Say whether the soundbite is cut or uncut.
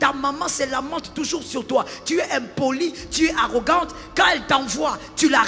uncut